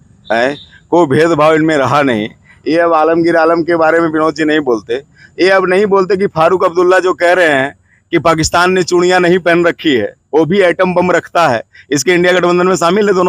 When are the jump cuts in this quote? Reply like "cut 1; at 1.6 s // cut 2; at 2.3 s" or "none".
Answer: none